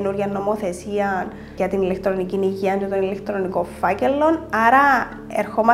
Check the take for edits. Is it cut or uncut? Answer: cut